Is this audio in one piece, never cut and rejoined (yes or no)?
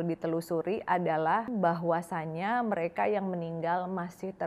no